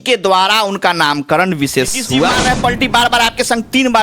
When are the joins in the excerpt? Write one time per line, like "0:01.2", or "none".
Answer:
0:02.4